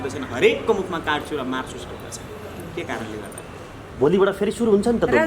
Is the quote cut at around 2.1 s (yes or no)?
no